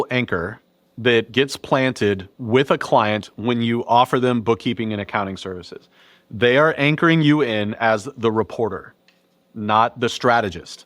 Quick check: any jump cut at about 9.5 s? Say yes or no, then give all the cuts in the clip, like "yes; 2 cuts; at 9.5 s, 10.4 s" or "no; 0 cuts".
no; 1 cut; at 1.3 s